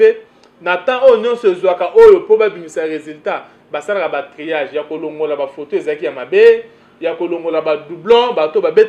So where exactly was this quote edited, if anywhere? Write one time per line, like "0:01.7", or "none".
none

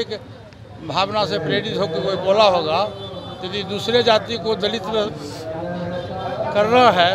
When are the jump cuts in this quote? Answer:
none

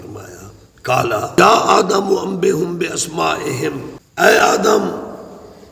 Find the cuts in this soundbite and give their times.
0:01.4
0:04.0

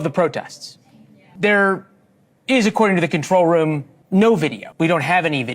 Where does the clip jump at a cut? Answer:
0:01.2
0:03.9
0:04.6

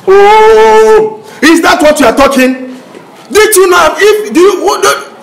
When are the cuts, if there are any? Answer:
none

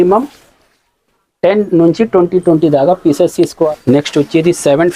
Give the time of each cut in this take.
0:03.7

